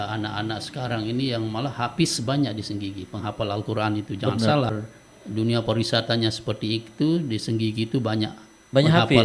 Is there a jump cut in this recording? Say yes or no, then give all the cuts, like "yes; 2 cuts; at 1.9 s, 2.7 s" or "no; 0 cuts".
no; 0 cuts